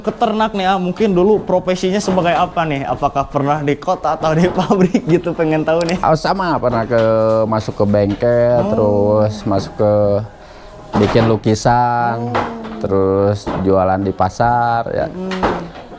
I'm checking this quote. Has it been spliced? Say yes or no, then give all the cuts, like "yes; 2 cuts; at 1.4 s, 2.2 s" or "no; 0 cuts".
yes; 1 cut; at 6.0 s